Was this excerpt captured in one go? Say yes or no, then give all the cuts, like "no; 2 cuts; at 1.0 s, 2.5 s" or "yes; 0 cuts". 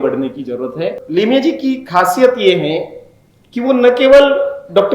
no; 1 cut; at 1.0 s